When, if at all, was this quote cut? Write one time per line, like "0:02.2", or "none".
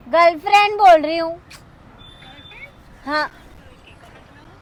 none